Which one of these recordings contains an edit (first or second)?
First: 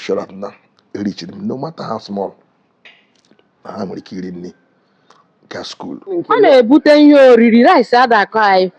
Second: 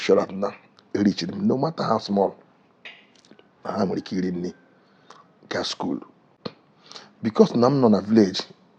first